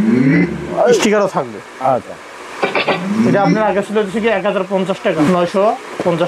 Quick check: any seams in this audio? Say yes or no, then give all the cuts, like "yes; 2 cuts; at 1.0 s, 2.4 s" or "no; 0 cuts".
yes; 2 cuts; at 1.0 s, 5.3 s